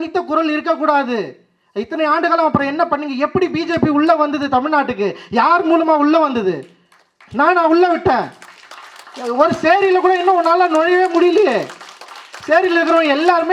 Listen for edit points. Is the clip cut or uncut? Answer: uncut